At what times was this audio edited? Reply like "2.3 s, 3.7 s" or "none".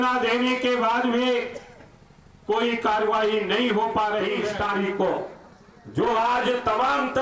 4.5 s